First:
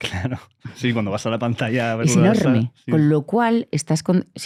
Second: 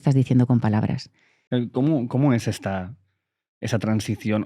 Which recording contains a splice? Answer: second; 1 cut; at 1.4 s

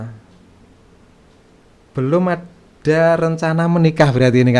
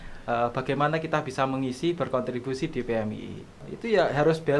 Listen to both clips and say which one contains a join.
second; 1 cut; at 3.6 s

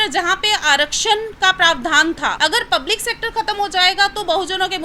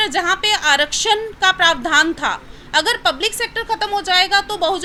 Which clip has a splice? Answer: first; 1 cut; at 2.3 s

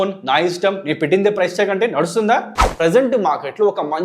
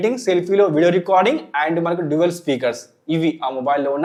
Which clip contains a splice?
first; 1 cut; at 2.6 s

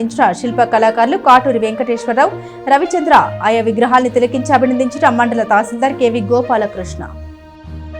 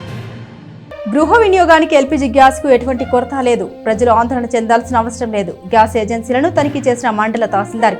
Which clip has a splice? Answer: second; 1 cut; at 1.0 s

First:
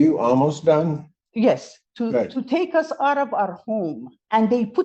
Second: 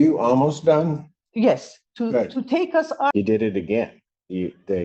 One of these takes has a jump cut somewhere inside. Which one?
second; 1 cut; at 3.1 s

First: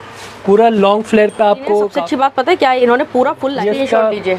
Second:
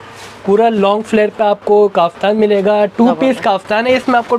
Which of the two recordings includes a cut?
first; 2 cuts; at 1.9 s, 3.5 s

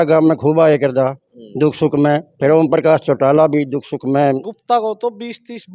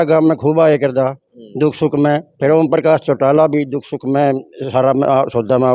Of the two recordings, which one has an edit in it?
first; 1 cut; at 4.5 s

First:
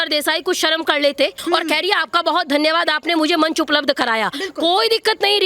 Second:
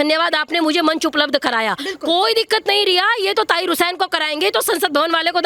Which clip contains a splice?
first; 1 cut; at 1.4 s

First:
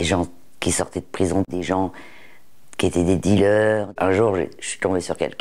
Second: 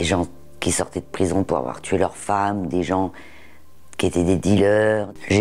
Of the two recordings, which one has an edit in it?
first; 2 cuts; at 1.5 s, 3.9 s

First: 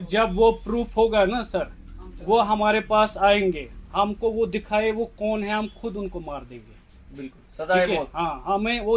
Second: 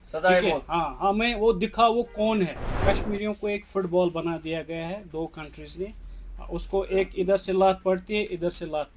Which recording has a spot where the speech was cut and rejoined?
second; 1 cut; at 2.7 s

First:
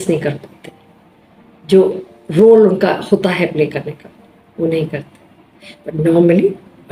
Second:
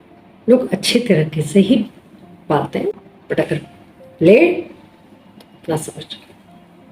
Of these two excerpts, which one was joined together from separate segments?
second; 1 cut; at 3.0 s

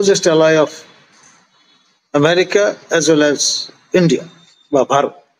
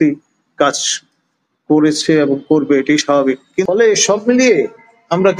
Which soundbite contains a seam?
second; 1 cut; at 3.7 s

